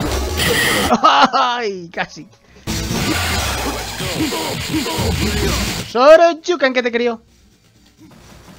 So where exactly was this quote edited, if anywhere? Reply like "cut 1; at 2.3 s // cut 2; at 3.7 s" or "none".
cut 1; at 2.6 s